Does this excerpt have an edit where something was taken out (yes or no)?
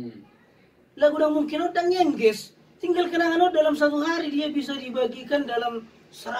no